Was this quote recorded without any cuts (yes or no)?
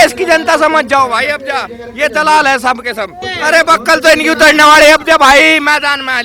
no